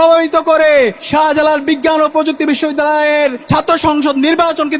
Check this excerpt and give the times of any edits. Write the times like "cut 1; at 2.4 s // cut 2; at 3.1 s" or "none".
cut 1; at 1.0 s // cut 2; at 3.4 s